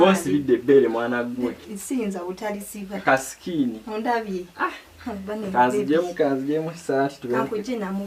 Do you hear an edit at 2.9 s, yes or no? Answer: no